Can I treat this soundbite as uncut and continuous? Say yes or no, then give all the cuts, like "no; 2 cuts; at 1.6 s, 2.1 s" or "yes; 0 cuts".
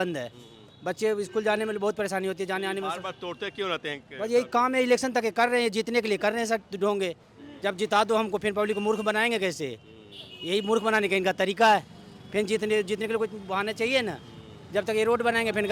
yes; 0 cuts